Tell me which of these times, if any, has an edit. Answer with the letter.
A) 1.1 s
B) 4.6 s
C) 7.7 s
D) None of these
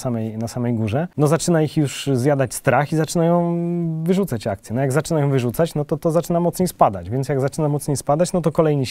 A